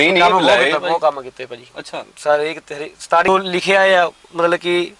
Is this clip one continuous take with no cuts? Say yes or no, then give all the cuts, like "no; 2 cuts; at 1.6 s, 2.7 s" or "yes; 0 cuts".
no; 1 cut; at 3.3 s